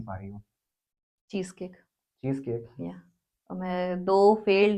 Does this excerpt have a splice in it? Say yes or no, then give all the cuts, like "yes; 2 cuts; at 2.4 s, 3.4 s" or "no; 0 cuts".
no; 0 cuts